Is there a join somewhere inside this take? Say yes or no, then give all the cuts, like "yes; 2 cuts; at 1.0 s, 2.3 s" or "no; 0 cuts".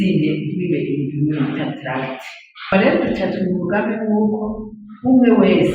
yes; 1 cut; at 2.7 s